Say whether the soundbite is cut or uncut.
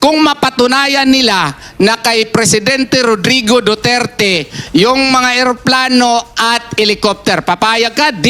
uncut